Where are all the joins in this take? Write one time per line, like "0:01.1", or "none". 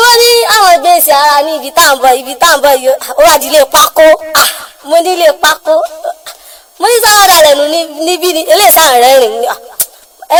none